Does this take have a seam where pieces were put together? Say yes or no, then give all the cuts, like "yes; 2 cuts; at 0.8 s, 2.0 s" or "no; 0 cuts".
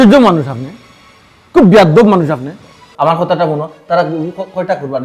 yes; 1 cut; at 2.9 s